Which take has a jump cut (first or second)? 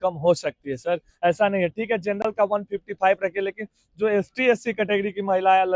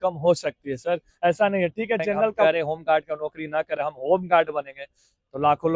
second